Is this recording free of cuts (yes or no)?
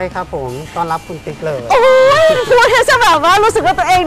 yes